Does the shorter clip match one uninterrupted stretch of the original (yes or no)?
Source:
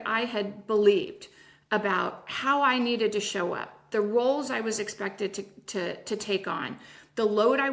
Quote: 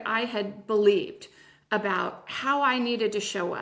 yes